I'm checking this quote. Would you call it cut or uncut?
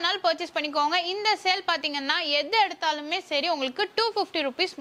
uncut